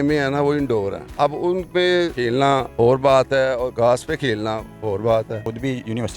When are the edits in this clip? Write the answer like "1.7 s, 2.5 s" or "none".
1.0 s, 2.2 s, 3.7 s, 5.4 s

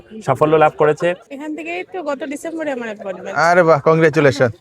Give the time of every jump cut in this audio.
1.3 s

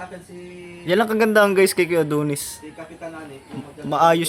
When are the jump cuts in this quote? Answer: none

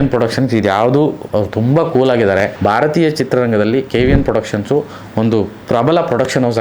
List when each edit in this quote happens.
1.2 s, 2.5 s

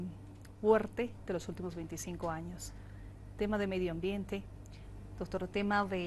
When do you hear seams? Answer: 2.6 s

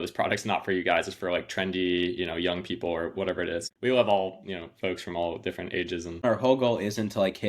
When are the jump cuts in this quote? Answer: 3.7 s, 6.2 s

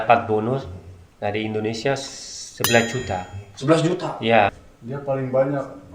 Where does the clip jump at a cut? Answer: 4.6 s

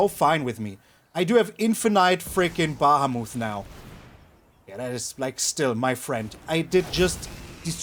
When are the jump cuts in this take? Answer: none

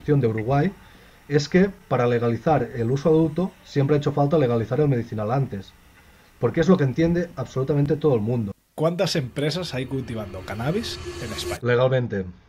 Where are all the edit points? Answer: 8.6 s, 11.6 s

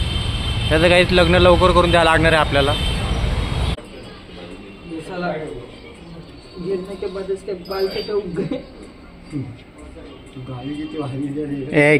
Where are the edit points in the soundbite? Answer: 3.8 s

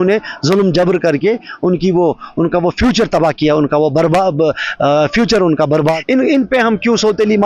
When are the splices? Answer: 6.0 s

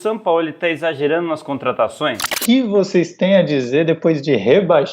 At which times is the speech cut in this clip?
2.3 s

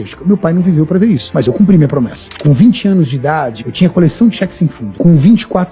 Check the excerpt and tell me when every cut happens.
1.3 s, 2.3 s, 3.6 s, 4.8 s

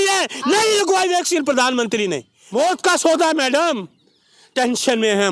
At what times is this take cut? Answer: 2.3 s

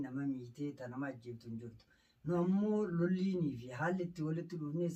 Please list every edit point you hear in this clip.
none

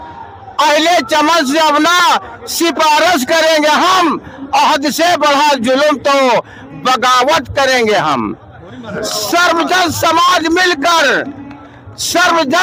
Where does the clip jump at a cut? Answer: none

